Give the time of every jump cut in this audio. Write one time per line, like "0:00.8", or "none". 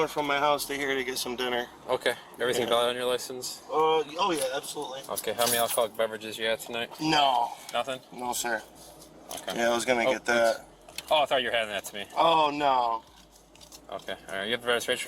none